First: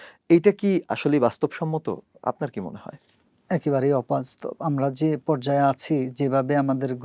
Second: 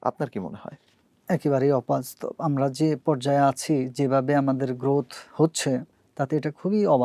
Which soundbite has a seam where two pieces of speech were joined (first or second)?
second